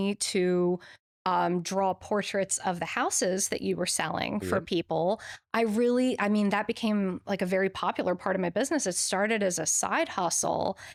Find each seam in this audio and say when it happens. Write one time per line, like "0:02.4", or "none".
none